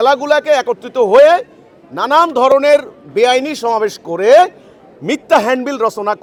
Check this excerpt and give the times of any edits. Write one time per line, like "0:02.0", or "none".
none